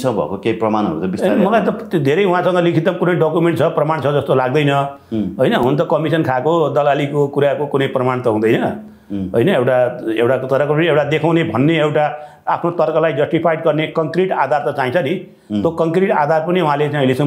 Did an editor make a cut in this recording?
no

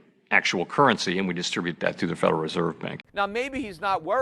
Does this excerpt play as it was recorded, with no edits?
no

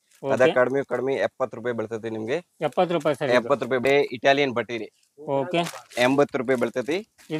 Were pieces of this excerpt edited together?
yes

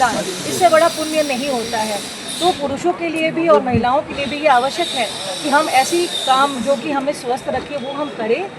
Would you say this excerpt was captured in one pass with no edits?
yes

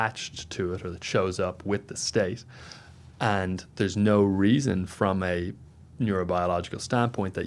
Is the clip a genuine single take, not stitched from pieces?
yes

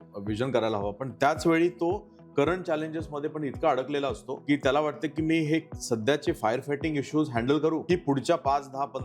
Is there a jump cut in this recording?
yes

